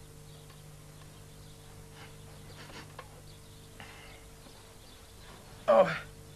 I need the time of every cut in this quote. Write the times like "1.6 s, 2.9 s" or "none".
4.6 s